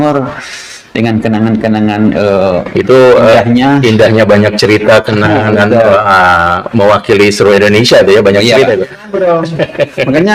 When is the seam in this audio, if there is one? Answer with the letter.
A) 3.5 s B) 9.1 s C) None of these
B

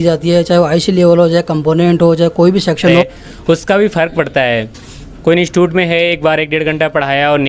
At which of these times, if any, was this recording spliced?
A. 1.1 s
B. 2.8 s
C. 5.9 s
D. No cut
B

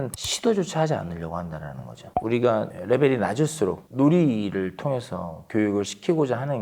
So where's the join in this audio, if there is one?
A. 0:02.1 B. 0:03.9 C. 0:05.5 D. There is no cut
A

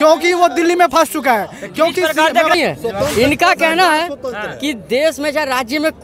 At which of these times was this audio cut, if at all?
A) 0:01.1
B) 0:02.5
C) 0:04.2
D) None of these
B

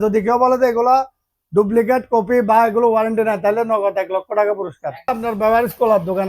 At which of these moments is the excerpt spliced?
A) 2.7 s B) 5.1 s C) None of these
B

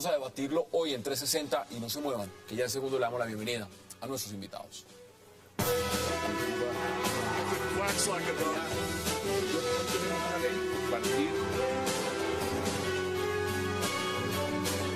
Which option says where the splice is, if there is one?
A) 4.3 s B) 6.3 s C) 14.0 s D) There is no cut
C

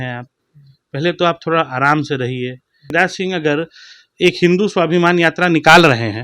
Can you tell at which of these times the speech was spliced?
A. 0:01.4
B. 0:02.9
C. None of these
B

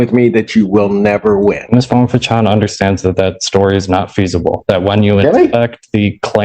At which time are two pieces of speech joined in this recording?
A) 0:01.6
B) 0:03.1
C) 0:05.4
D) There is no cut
A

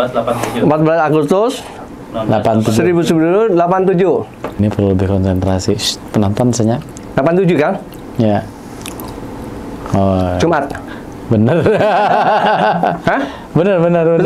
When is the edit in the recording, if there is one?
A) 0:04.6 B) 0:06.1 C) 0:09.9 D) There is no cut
A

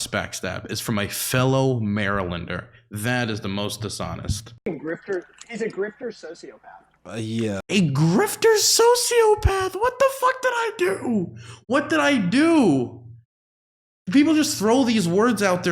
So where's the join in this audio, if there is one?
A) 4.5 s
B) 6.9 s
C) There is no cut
A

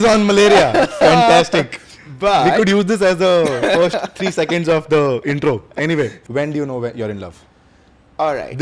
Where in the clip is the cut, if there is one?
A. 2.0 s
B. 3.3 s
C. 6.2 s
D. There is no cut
C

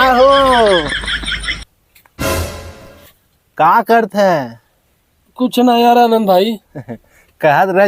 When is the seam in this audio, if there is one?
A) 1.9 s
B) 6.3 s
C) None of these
C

